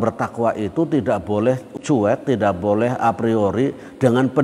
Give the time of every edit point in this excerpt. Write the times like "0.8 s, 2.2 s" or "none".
1.7 s